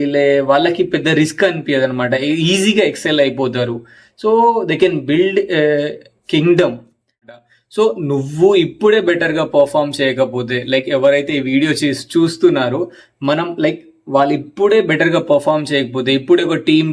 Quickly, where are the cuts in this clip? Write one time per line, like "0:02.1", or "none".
0:07.4